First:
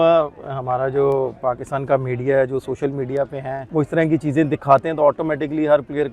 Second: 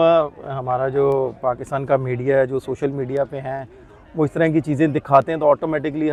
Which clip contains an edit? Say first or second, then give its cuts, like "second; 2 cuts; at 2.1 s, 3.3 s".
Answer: first; 1 cut; at 3.6 s